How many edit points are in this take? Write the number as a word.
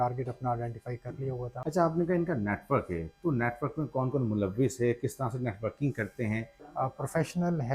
two